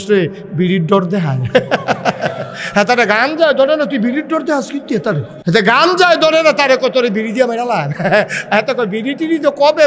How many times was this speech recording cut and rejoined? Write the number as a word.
one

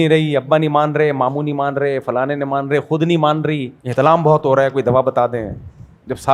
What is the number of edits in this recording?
one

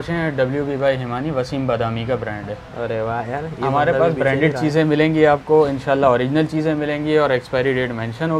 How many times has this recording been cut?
zero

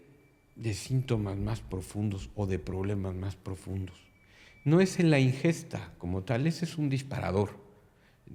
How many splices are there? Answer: zero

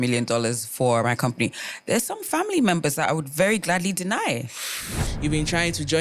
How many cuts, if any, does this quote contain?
one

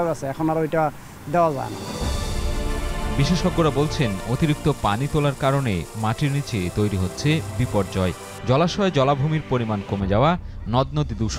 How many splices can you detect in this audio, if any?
zero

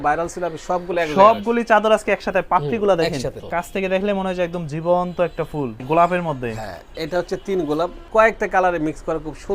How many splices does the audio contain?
three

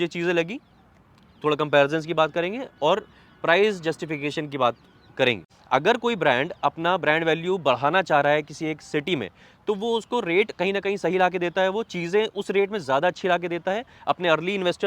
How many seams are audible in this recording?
one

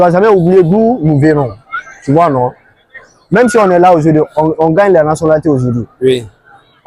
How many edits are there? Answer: zero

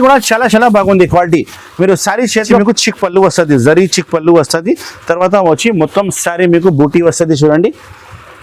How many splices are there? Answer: one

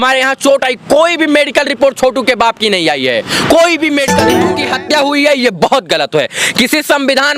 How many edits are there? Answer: one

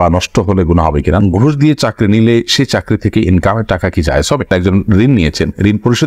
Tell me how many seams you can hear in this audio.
two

